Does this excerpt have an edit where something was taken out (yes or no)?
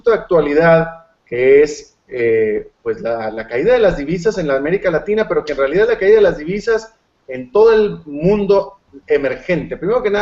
yes